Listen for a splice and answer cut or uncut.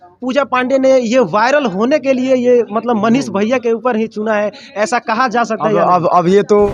uncut